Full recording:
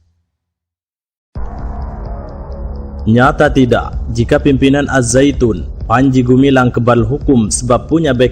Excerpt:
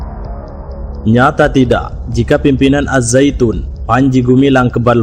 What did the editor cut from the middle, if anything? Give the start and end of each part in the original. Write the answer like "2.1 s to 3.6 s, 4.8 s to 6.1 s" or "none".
2.8 s to 3.0 s